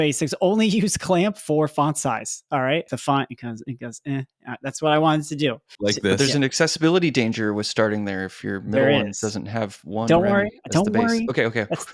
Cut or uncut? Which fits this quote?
cut